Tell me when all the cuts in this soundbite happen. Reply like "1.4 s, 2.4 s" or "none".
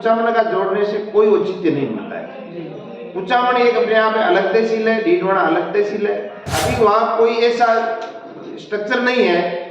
6.6 s

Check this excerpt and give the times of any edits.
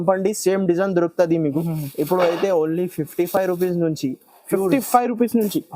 1.7 s

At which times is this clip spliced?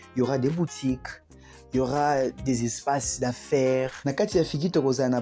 4.0 s

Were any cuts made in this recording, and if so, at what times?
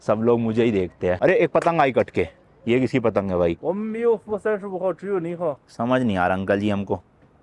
3.6 s

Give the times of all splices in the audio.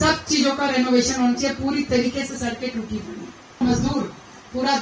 3.6 s

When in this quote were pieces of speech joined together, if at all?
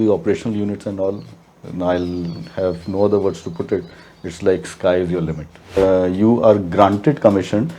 5.8 s

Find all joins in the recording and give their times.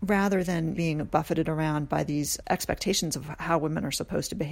0.8 s, 2.4 s

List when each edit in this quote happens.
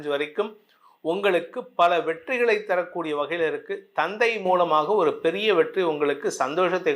none

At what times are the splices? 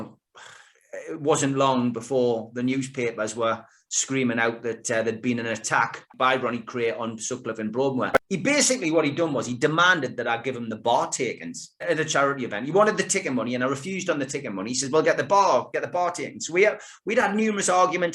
8.2 s, 11.8 s

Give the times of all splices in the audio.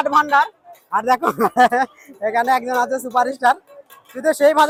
none

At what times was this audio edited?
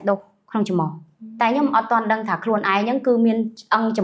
none

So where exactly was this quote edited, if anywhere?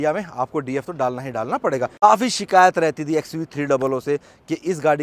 none

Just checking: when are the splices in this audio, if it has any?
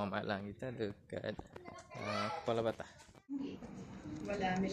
3.3 s

